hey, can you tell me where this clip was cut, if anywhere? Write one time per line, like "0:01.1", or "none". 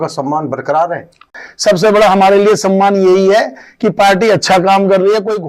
0:01.3